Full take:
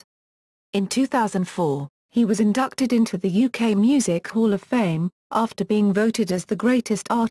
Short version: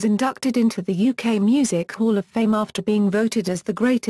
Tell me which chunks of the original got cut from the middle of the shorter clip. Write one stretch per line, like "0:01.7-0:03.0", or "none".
0:04.6-0:05.1